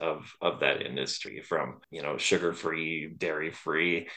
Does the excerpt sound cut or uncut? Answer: cut